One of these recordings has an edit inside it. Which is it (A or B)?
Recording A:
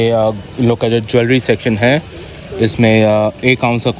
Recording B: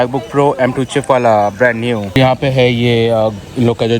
B